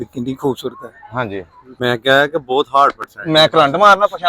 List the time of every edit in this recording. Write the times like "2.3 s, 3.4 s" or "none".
1.6 s